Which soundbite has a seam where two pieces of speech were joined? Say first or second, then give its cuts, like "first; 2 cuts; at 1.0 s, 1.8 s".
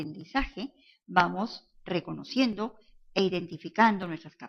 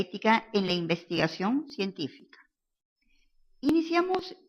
second; 1 cut; at 2.5 s